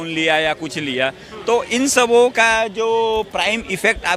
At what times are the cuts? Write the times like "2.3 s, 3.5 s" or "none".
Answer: none